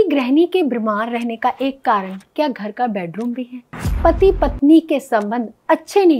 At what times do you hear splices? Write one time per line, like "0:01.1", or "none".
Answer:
none